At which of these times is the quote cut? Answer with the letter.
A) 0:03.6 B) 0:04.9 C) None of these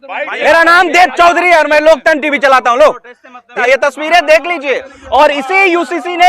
A